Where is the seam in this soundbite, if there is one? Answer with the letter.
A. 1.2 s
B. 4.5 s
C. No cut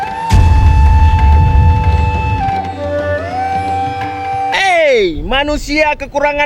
B